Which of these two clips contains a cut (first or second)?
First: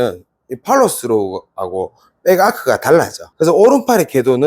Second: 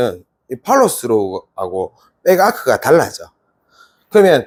first